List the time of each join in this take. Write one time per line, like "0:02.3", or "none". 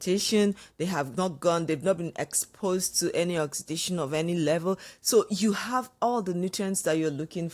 none